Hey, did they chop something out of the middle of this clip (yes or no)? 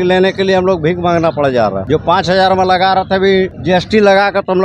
yes